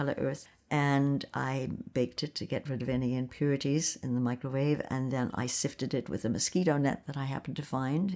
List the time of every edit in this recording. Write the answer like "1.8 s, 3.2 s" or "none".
none